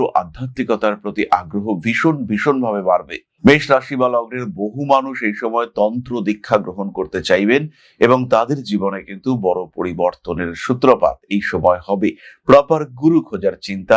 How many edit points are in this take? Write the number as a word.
zero